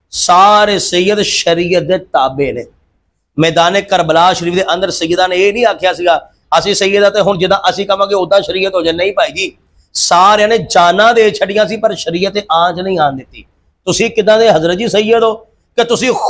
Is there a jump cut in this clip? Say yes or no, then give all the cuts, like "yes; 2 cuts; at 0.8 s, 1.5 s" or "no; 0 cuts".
no; 0 cuts